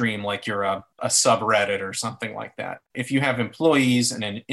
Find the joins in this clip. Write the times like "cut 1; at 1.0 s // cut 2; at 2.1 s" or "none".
cut 1; at 1.0 s // cut 2; at 2.9 s